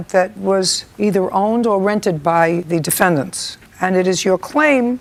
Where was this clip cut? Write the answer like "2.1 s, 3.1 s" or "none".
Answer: none